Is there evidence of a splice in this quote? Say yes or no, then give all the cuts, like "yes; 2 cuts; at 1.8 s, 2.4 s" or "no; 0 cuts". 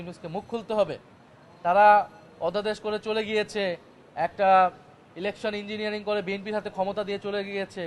no; 0 cuts